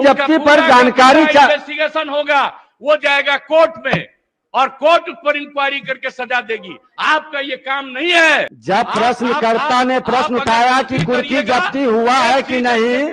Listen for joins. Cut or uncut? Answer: cut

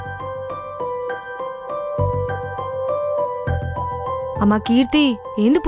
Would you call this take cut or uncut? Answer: uncut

